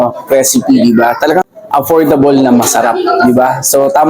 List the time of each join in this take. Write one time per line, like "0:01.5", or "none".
0:01.4